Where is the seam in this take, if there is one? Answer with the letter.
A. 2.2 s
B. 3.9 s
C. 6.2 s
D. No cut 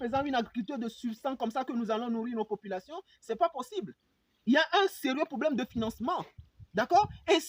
D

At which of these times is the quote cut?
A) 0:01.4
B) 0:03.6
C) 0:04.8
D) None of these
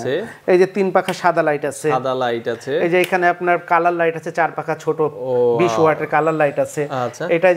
D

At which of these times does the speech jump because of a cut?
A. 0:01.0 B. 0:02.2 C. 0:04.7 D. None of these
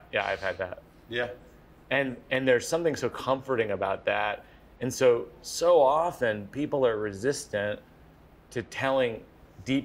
D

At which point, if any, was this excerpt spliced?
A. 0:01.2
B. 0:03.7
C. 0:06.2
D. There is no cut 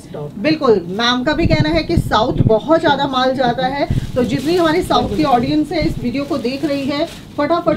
D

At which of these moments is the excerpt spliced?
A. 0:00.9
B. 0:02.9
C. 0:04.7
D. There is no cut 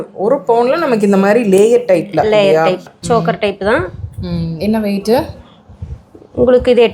B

